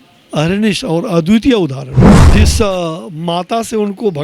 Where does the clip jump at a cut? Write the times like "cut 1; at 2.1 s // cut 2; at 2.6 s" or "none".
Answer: cut 1; at 2.3 s